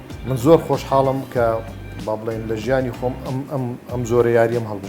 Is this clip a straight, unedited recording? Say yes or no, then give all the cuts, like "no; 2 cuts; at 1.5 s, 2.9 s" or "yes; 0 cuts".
yes; 0 cuts